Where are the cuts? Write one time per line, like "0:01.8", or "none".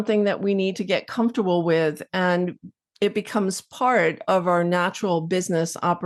none